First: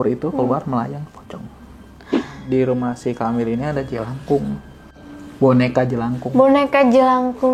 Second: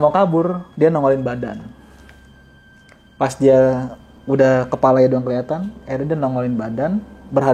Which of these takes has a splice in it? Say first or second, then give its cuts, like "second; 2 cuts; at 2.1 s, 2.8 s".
first; 1 cut; at 2.3 s